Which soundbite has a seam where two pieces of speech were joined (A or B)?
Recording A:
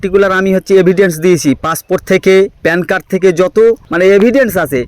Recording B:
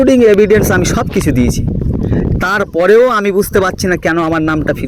A